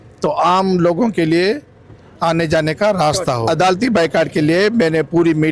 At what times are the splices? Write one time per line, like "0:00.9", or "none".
0:03.4